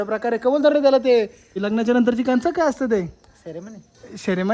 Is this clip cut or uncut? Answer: cut